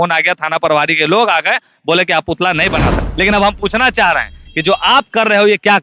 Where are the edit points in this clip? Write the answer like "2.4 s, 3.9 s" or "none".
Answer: 3.0 s